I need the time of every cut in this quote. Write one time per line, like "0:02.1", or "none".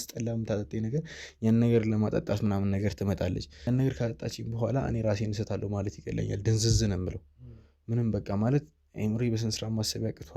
0:03.5